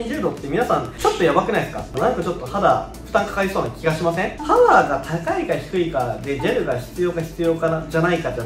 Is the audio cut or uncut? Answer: cut